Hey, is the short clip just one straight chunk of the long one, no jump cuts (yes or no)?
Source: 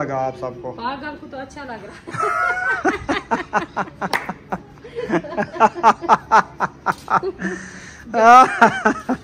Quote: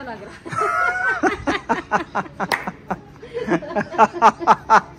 yes